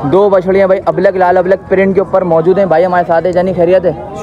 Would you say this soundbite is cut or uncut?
uncut